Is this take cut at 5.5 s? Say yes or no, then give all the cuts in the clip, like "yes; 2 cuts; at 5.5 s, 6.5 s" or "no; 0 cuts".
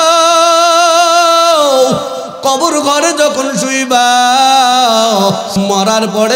yes; 1 cut; at 5.5 s